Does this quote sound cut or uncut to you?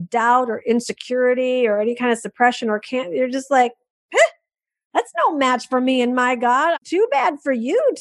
cut